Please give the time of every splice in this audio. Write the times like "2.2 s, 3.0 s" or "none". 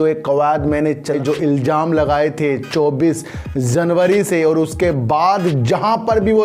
1.2 s